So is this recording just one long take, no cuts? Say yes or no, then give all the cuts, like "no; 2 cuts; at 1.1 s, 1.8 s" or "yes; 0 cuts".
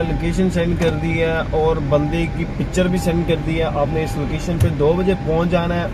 yes; 0 cuts